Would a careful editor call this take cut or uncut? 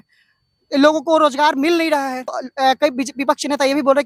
uncut